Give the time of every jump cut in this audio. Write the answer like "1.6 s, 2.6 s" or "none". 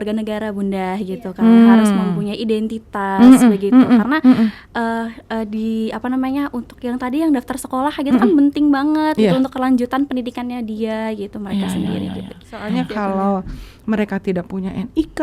12.7 s

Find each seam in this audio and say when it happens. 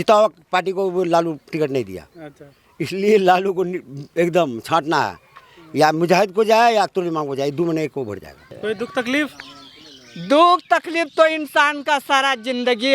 8.5 s

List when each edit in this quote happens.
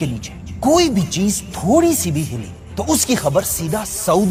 none

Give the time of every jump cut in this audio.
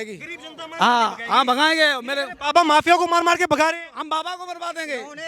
none

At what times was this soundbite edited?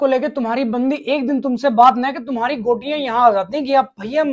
none

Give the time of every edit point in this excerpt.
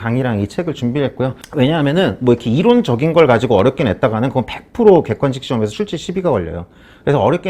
1.4 s

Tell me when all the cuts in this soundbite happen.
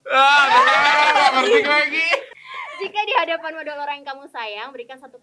2.3 s

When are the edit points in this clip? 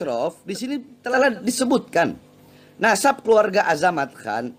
0.9 s

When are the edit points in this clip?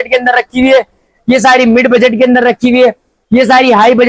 none

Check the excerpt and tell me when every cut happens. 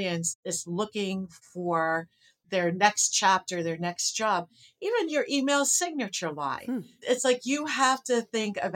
none

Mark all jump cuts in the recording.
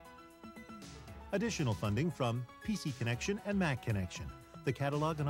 none

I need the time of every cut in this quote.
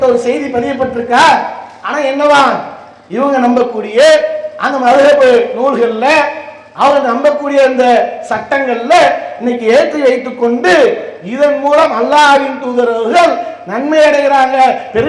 none

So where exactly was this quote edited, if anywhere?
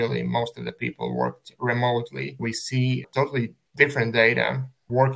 3.6 s

